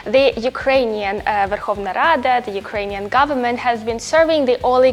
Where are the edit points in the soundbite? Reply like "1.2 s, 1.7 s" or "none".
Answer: none